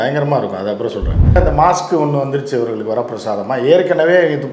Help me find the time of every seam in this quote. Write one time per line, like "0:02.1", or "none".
0:01.4